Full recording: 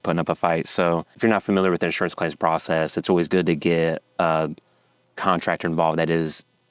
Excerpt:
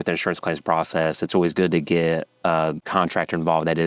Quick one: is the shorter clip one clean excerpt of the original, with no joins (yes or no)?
no